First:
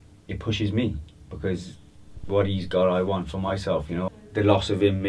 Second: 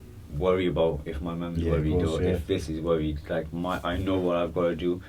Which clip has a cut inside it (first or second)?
first